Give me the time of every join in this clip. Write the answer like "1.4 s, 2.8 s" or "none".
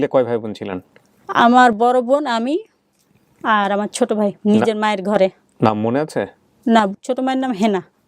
6.9 s